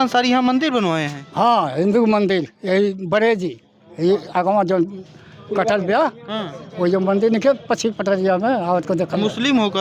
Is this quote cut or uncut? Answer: uncut